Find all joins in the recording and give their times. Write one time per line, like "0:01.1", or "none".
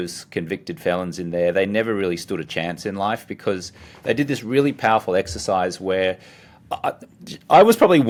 none